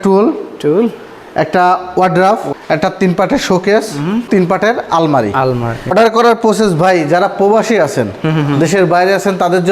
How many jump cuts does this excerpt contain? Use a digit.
3